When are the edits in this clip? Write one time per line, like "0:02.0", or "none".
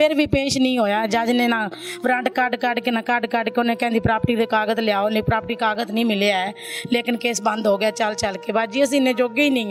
none